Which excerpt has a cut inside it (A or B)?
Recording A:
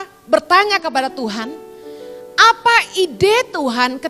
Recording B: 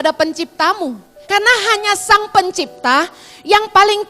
B